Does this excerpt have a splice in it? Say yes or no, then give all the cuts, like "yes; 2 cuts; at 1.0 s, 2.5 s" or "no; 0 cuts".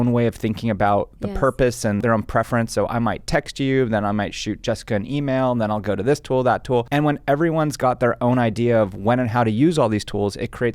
yes; 1 cut; at 2.0 s